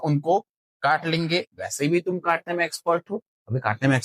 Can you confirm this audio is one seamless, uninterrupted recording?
yes; 0 cuts

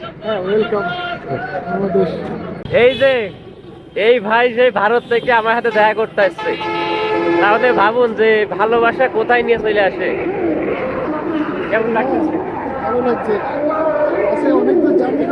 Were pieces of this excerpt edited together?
no; 0 cuts

